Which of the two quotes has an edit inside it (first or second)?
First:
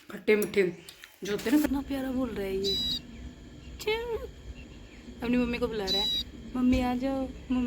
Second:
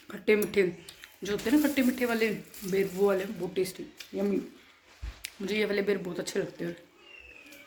first